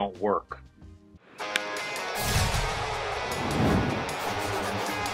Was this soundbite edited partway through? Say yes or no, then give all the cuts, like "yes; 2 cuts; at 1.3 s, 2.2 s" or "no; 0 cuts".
yes; 1 cut; at 1.2 s